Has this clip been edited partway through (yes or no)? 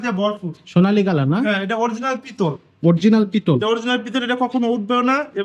no